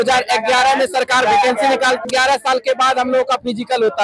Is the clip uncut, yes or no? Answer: no